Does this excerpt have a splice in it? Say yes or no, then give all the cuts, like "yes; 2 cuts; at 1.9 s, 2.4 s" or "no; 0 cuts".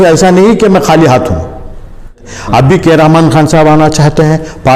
yes; 1 cut; at 2.2 s